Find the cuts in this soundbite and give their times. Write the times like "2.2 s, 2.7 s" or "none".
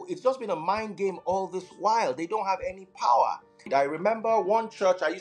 3.7 s